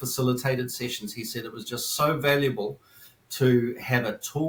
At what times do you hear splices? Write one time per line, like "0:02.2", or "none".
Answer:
none